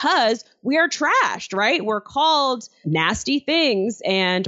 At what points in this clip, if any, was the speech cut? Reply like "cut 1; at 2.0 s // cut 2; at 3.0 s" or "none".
cut 1; at 2.8 s

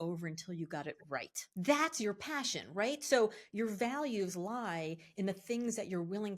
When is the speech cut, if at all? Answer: cut 1; at 1.2 s

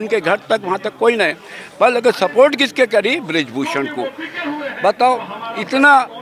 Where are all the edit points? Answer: none

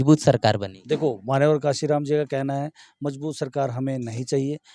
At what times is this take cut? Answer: none

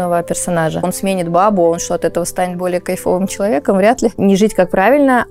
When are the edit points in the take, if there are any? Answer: cut 1; at 0.8 s // cut 2; at 4.1 s

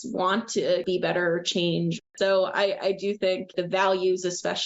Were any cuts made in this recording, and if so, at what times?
cut 1; at 0.8 s // cut 2; at 2.0 s // cut 3; at 3.5 s

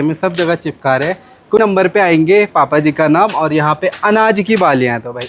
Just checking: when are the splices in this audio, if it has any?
cut 1; at 1.6 s

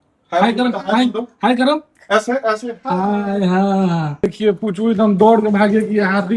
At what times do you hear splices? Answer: cut 1; at 4.1 s

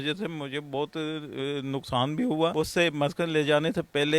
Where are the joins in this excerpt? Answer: cut 1; at 2.5 s

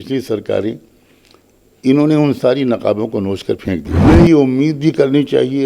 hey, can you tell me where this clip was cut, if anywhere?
cut 1; at 4.1 s

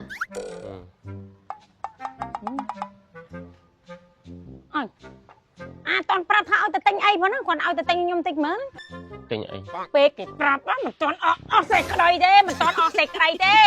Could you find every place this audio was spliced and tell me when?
cut 1; at 8.8 s

